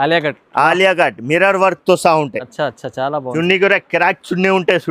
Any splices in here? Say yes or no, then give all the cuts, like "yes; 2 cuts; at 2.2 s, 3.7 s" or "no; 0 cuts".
no; 0 cuts